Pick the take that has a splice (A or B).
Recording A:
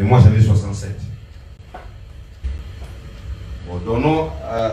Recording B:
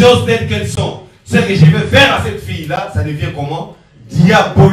A